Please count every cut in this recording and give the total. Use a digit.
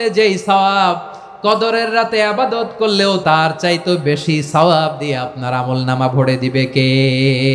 1